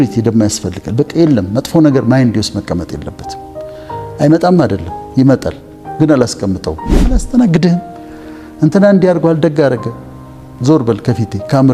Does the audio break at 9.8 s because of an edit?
no; 1 cut; at 7.2 s

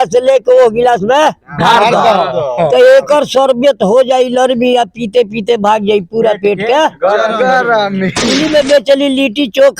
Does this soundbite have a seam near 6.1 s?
no; 1 cut; at 8.2 s

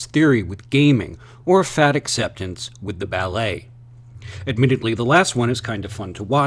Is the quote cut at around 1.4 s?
no; 1 cut; at 4.1 s

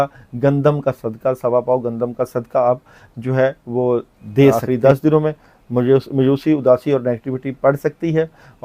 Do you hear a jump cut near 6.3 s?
no; 1 cut; at 4.5 s

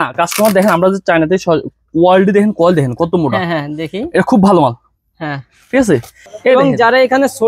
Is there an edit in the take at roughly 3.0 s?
no; 1 cut; at 6.3 s

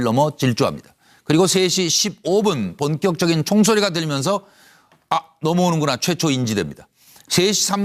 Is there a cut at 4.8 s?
no; 1 cut; at 6.2 s

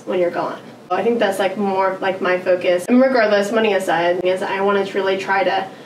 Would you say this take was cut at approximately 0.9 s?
yes; 3 cuts; at 0.9 s, 2.8 s, 4.2 s

